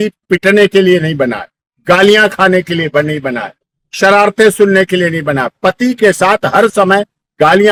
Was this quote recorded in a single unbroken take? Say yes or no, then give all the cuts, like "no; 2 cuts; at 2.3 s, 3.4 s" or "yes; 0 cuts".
yes; 0 cuts